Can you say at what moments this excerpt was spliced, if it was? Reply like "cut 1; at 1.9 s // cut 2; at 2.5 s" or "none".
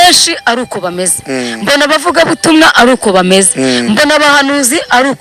none